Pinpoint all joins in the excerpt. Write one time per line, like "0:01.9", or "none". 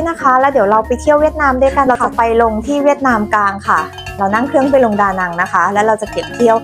0:02.0